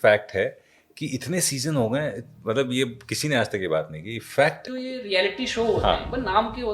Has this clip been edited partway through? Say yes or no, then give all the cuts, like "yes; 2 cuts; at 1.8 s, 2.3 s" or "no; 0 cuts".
yes; 1 cut; at 4.6 s